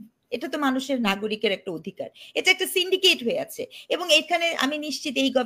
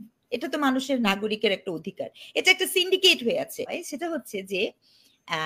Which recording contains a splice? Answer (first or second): second